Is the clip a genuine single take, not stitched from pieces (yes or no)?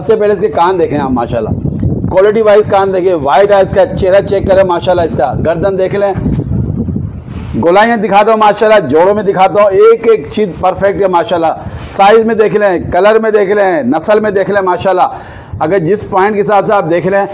yes